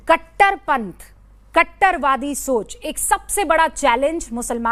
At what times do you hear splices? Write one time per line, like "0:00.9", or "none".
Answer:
none